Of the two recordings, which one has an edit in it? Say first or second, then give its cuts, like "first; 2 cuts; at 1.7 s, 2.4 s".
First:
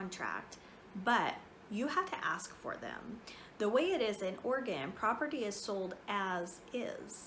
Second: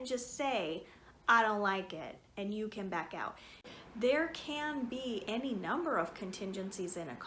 second; 1 cut; at 3.6 s